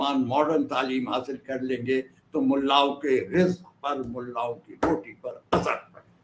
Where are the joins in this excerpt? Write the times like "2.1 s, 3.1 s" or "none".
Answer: none